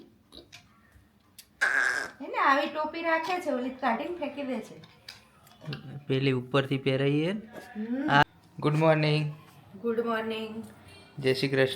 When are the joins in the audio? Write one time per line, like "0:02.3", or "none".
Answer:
0:08.2